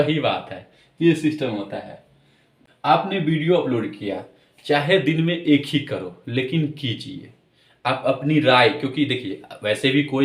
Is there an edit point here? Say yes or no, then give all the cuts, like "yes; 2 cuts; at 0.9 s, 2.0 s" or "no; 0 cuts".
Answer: yes; 1 cut; at 2.5 s